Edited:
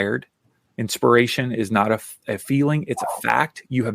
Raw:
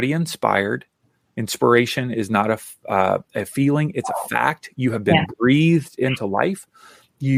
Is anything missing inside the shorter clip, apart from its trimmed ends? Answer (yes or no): yes